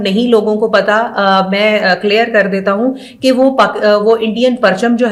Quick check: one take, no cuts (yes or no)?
yes